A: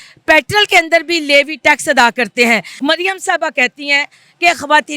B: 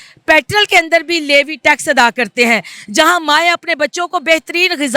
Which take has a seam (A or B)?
A